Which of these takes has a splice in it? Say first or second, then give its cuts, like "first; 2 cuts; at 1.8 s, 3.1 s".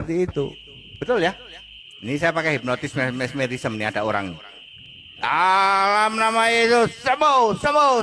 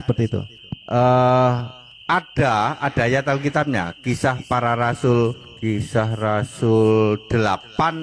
first; 1 cut; at 7.0 s